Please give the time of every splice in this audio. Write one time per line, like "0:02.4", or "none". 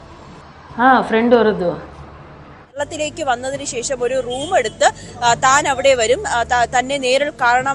0:02.8